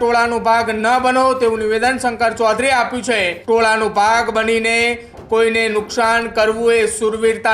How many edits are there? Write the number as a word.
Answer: one